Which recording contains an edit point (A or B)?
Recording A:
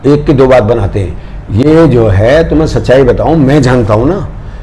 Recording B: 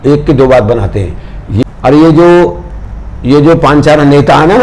B